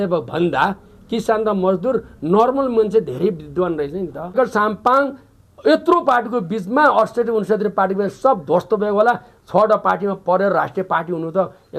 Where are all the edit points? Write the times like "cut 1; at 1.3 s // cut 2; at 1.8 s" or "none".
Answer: cut 1; at 4.3 s